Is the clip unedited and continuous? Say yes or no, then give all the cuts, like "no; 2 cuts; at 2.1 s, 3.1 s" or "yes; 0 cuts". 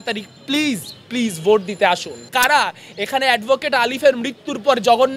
no; 1 cut; at 2.2 s